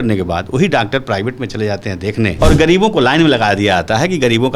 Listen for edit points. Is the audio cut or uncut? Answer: cut